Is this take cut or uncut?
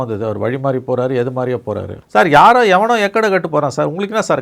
cut